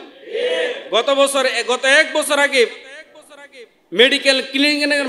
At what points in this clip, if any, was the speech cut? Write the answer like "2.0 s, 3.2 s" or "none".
none